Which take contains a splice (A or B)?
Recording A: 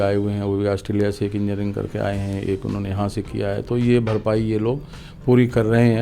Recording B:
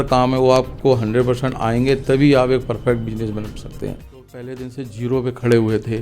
B